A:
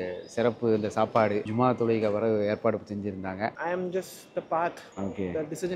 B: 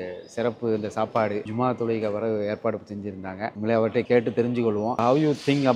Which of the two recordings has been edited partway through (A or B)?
A